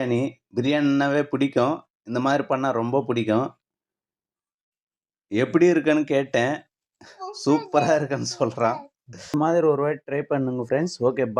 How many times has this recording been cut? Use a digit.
1